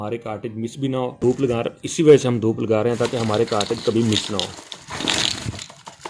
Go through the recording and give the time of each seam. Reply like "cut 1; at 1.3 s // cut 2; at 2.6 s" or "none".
cut 1; at 1.2 s